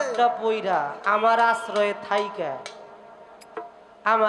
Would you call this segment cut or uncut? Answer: uncut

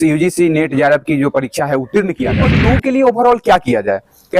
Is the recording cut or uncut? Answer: cut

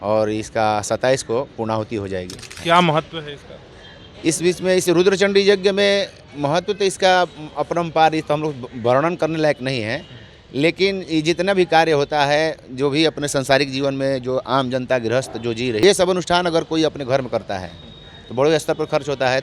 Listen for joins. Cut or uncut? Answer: cut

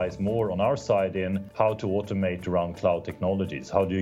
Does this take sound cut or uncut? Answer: cut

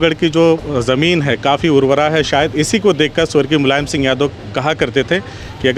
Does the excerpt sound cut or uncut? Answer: uncut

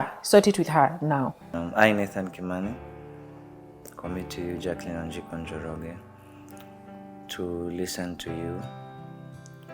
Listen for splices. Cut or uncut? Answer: cut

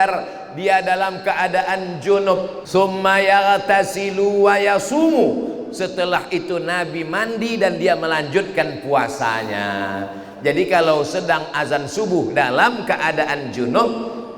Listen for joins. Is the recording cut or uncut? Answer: cut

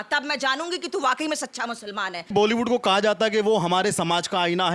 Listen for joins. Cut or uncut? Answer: cut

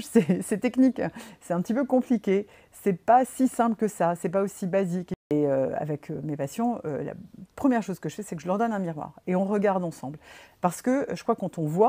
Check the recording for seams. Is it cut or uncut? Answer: cut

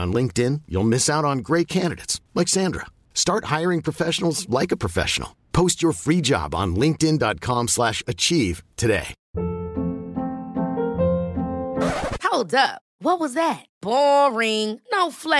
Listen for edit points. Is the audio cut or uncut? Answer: cut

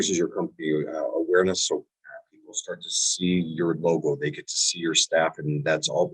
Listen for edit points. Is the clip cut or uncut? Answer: uncut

